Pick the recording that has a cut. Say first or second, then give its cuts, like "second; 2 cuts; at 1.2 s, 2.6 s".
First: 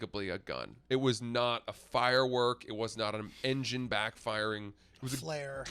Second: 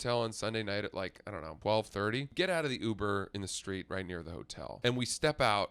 second; 3 cuts; at 1.5 s, 2.3 s, 4.7 s